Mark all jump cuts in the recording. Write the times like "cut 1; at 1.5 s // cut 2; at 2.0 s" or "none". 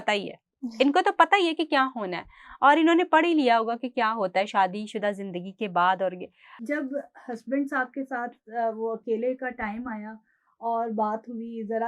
cut 1; at 6.6 s